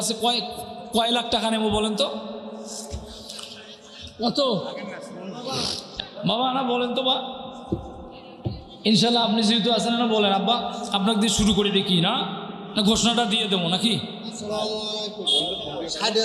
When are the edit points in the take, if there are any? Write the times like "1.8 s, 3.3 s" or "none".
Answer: 5.9 s